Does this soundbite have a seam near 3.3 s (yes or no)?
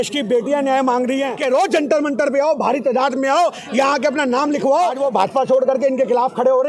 no